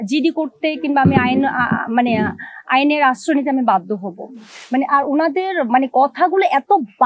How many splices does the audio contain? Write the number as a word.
one